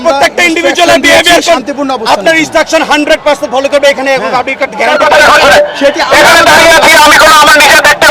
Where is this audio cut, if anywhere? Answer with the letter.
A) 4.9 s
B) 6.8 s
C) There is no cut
A